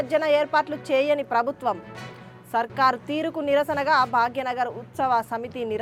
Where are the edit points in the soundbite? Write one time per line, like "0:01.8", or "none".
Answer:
none